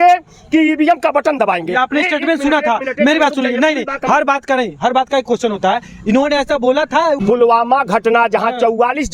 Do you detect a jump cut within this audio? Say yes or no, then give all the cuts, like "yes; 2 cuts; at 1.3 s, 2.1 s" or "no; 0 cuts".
no; 0 cuts